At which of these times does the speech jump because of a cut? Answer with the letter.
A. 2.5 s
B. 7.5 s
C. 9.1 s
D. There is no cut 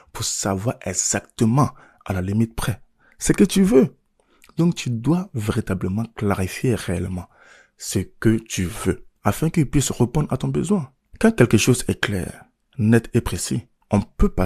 C